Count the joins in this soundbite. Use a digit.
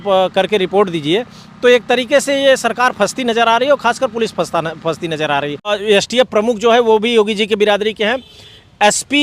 1